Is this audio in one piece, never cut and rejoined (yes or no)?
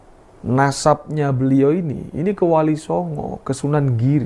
yes